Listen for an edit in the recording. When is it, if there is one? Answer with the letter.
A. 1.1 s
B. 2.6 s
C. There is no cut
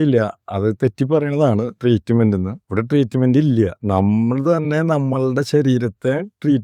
C